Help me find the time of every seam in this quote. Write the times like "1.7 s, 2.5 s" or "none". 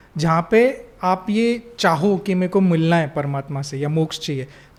none